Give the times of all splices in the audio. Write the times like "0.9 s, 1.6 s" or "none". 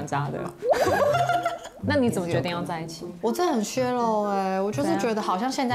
1.7 s